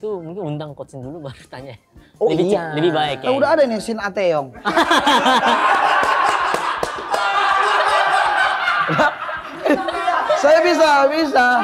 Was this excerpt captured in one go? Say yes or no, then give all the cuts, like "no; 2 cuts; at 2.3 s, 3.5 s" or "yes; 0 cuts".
yes; 0 cuts